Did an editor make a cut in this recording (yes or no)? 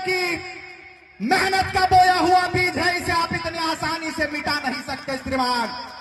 no